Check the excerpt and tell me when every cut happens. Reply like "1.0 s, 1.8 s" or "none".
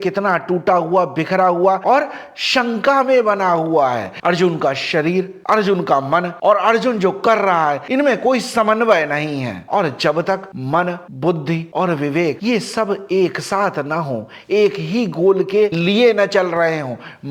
none